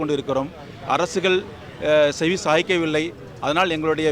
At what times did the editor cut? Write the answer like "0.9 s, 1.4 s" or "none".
none

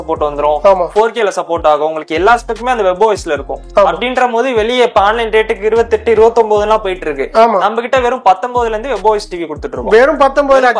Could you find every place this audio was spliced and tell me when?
none

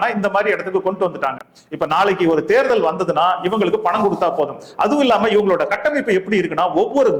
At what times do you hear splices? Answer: none

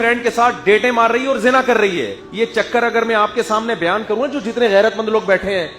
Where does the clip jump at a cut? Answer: 2.2 s

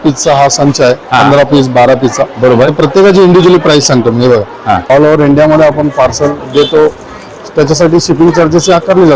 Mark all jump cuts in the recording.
4.8 s

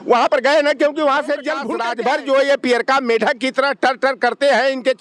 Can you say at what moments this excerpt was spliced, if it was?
1.7 s

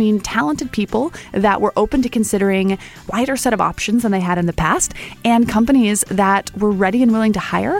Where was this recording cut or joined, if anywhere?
3.1 s

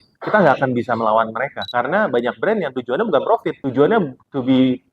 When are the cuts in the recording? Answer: 1.6 s

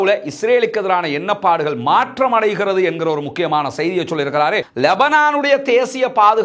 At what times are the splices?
4.7 s

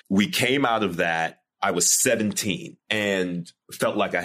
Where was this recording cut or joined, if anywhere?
2.7 s

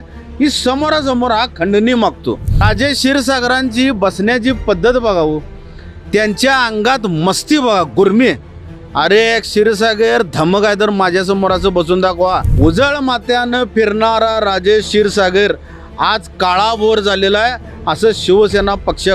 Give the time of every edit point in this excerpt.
2.7 s, 12.5 s

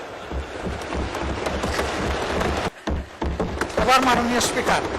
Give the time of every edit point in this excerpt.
2.6 s

